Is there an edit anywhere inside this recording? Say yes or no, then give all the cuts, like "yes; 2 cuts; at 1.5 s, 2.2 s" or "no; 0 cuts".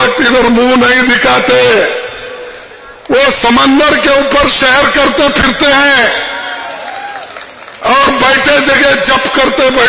no; 0 cuts